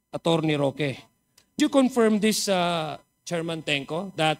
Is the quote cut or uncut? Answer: cut